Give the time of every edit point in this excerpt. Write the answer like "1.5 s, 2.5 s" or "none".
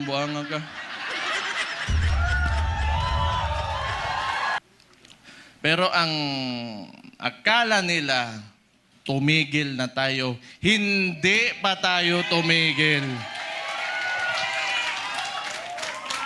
4.6 s